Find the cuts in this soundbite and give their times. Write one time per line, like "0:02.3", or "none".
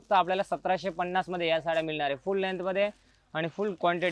none